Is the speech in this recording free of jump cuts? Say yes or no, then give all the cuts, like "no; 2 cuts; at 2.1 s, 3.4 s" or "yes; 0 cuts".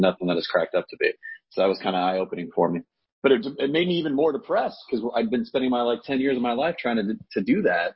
yes; 0 cuts